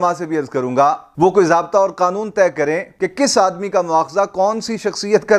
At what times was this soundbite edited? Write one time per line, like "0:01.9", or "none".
none